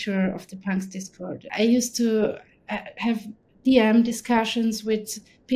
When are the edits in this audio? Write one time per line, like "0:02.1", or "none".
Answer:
0:01.4

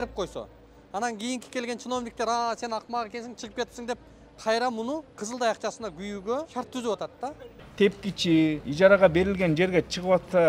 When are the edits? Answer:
0:05.1
0:06.5
0:07.6
0:08.7

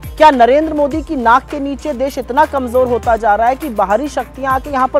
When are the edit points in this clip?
none

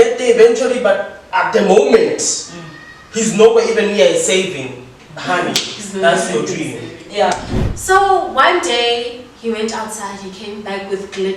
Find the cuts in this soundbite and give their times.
0:07.5

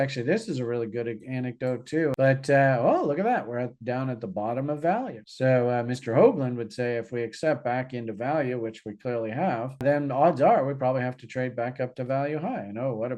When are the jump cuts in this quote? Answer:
0:02.1

